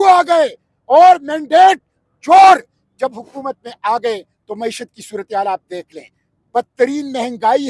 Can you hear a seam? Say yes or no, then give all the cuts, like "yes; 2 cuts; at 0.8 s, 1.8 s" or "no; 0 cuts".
no; 0 cuts